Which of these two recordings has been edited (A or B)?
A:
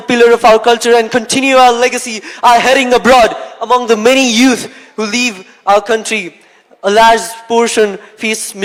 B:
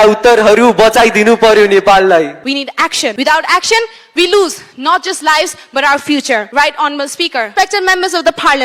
B